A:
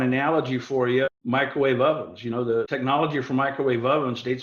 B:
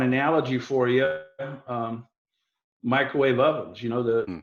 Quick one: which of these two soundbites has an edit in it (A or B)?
A